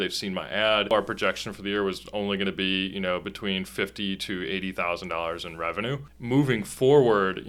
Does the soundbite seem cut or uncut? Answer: cut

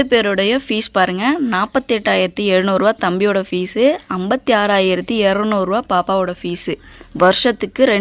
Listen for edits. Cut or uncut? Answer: uncut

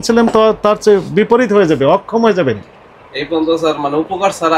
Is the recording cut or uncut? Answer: uncut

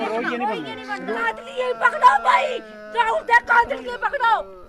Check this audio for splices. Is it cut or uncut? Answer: cut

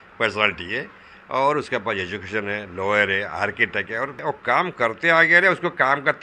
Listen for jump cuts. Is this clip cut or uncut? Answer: cut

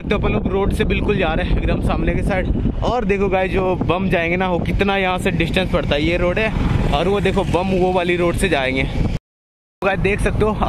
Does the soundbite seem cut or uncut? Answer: cut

